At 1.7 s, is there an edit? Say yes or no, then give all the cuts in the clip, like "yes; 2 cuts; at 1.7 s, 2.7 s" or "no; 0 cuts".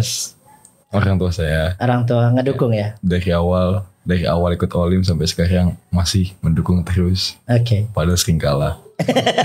no; 0 cuts